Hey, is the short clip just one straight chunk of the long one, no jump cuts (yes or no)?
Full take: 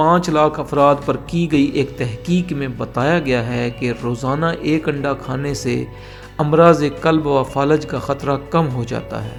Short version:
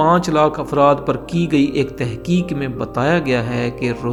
yes